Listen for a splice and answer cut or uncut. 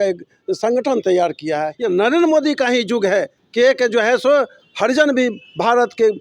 cut